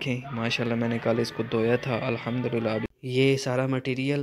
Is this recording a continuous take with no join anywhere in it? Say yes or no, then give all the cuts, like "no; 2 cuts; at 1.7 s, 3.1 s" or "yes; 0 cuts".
no; 1 cut; at 2.8 s